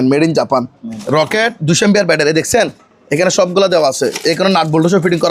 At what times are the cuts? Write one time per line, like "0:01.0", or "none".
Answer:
0:01.0